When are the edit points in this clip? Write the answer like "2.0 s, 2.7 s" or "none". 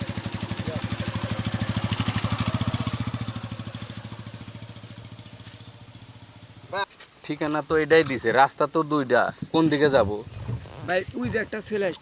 6.8 s